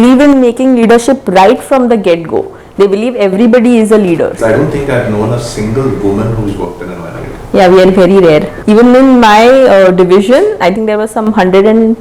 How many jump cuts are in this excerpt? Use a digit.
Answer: 2